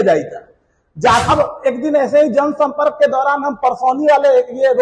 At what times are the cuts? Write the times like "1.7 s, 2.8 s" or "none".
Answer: 1.2 s